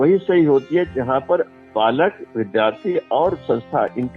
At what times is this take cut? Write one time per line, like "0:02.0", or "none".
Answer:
0:01.5